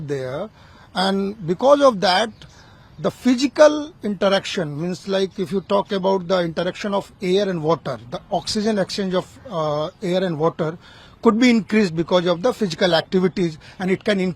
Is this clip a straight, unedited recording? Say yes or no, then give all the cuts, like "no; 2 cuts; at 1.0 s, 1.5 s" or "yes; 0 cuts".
yes; 0 cuts